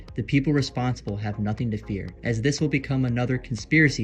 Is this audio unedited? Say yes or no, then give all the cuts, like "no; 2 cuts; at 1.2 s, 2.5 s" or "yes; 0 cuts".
no; 1 cut; at 2.1 s